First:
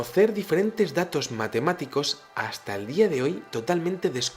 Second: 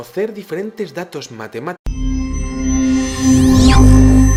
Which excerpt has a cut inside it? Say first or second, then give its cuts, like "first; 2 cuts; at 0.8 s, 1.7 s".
first; 1 cut; at 1.8 s